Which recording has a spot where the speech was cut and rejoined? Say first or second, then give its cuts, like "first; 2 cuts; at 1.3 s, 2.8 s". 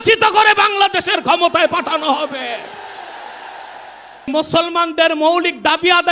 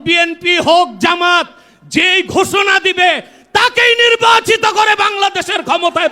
first; 1 cut; at 4.3 s